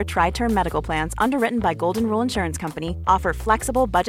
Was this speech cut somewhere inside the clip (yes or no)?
no